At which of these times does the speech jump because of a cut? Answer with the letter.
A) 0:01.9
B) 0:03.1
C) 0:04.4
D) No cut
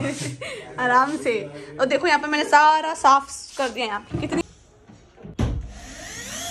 C